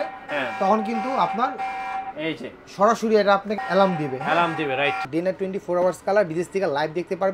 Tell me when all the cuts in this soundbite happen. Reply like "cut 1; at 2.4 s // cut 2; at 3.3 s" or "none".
cut 1; at 5.1 s